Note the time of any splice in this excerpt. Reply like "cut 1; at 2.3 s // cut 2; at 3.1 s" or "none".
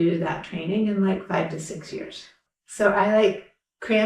cut 1; at 2.4 s